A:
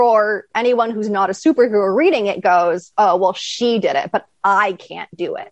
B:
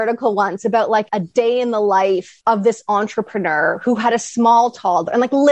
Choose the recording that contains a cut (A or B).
B